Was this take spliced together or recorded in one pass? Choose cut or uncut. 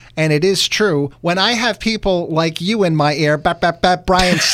cut